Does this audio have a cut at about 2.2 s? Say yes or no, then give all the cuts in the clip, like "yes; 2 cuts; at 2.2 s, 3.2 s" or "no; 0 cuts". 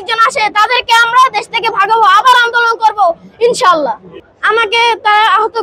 no; 1 cut; at 4.2 s